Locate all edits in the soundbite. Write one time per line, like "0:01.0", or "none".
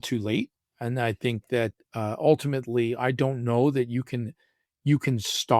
none